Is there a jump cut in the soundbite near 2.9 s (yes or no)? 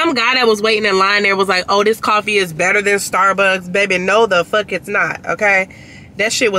no